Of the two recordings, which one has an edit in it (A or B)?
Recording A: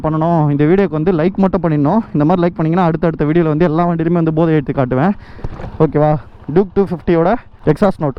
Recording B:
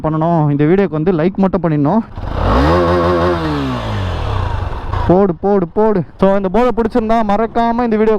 B